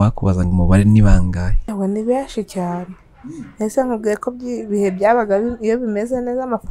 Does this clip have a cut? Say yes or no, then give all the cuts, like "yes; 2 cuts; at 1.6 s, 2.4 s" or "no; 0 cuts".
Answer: yes; 1 cut; at 1.7 s